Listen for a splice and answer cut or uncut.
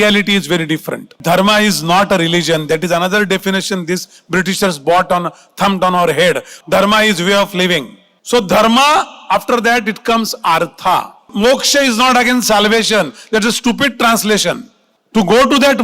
cut